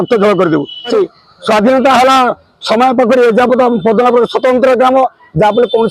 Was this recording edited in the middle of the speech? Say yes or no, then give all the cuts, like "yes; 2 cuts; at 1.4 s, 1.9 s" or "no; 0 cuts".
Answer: yes; 1 cut; at 0.9 s